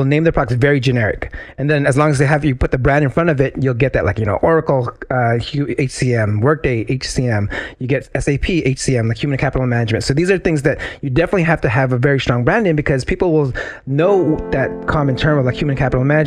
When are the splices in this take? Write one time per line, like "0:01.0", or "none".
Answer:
0:14.8